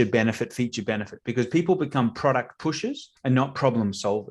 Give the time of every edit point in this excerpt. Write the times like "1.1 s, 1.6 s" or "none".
3.1 s

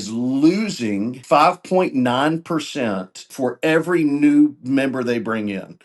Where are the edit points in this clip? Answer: 1.2 s, 3.3 s

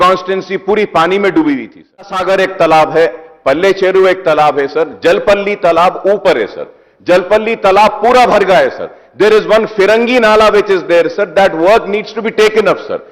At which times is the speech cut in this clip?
2.2 s

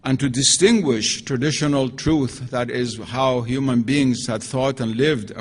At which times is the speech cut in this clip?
1.0 s

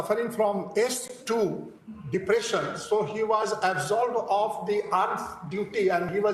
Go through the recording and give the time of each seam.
none

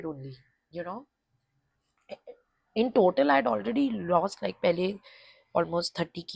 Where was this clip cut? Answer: none

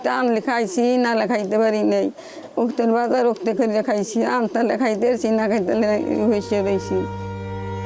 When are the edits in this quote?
none

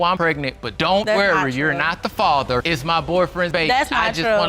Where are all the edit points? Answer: none

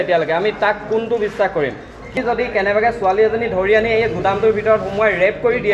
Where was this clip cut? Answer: 2.1 s

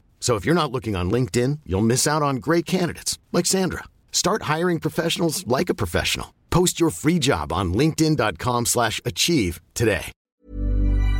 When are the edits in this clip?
10.2 s

